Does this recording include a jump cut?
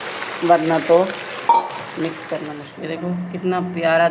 yes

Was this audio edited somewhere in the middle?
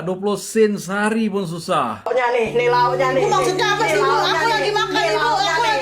yes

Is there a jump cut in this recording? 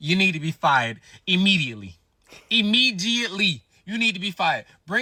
no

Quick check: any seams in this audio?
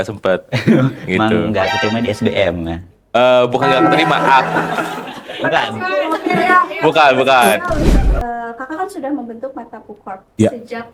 yes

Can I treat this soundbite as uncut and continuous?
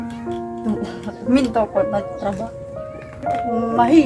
no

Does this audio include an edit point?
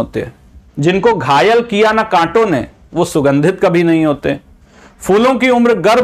no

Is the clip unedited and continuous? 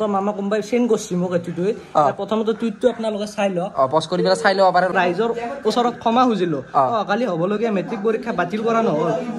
no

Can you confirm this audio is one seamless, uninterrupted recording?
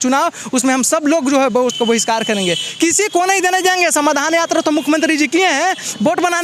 yes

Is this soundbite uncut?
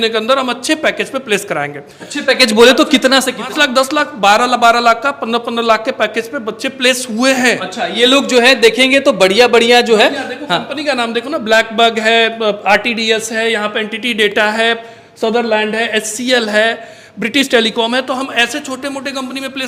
yes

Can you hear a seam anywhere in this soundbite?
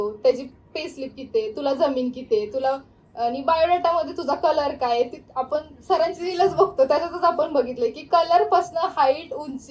no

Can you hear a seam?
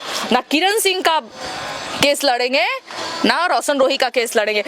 no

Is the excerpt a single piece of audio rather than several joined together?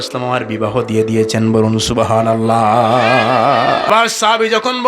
no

